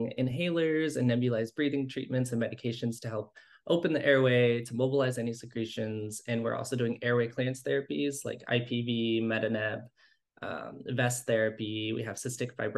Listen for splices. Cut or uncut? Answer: uncut